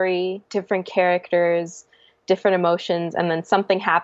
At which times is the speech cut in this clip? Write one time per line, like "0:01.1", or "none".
none